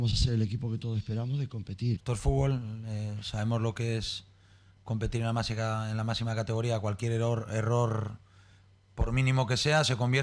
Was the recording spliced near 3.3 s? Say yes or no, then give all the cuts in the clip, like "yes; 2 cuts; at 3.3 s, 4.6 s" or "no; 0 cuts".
no; 1 cut; at 2.0 s